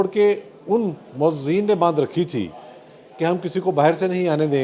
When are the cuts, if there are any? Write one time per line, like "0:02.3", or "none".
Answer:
0:01.0